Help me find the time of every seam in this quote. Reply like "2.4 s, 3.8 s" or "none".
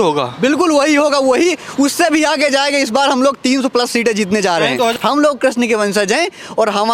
4.6 s